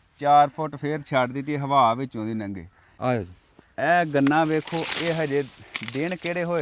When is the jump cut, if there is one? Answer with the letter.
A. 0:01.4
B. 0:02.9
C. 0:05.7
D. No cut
B